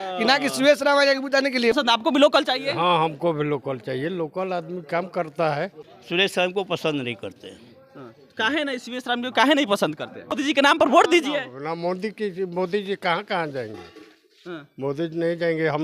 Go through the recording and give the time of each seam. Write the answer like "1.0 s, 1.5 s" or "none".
1.7 s, 5.9 s, 10.3 s